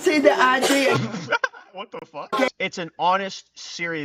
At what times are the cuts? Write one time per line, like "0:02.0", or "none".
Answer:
0:00.9
0:02.5